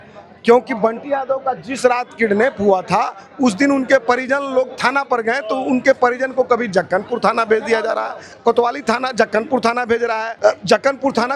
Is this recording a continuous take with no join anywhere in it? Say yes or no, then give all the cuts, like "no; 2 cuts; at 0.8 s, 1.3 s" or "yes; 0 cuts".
no; 2 cuts; at 8.2 s, 10.3 s